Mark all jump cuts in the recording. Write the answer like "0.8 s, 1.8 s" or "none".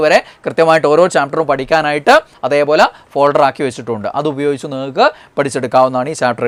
none